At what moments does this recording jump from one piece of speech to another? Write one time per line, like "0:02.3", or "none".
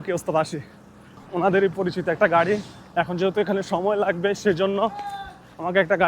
0:01.2